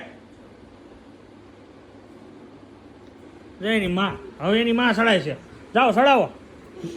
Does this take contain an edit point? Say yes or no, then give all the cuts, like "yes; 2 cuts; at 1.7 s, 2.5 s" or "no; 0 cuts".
no; 0 cuts